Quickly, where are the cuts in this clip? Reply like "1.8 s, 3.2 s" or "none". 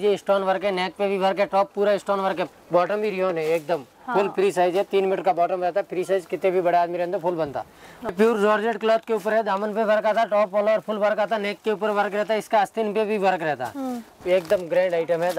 2.5 s, 8.1 s, 14.1 s